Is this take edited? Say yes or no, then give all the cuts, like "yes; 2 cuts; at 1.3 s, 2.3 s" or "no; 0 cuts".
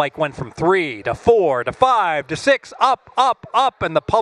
no; 0 cuts